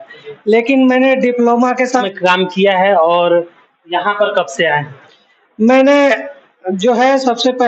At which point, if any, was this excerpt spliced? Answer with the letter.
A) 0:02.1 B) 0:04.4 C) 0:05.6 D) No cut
A